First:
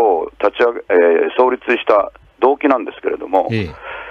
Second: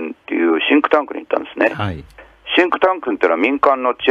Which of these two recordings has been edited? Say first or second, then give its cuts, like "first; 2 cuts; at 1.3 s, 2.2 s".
first; 1 cut; at 1.4 s